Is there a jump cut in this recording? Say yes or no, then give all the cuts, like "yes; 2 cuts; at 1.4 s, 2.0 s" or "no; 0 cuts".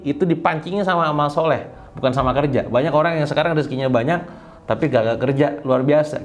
no; 0 cuts